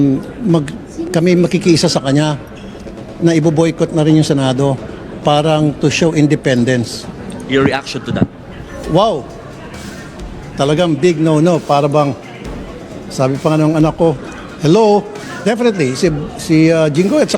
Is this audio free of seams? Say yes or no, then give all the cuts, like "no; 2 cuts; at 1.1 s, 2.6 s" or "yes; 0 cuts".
no; 2 cuts; at 2.5 s, 15.2 s